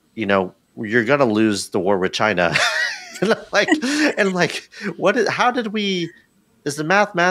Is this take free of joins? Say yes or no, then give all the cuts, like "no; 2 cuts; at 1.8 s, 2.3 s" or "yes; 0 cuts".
yes; 0 cuts